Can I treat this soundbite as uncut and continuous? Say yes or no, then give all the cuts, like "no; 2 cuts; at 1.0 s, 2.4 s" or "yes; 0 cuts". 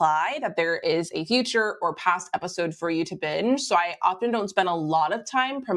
yes; 0 cuts